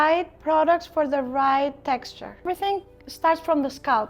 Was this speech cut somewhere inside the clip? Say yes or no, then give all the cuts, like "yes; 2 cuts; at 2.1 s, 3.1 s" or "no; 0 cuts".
yes; 1 cut; at 2.5 s